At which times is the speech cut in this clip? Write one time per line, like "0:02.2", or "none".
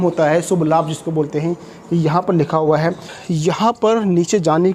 0:03.1